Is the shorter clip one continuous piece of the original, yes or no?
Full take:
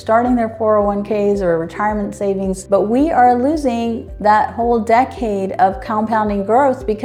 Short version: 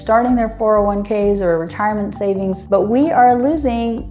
yes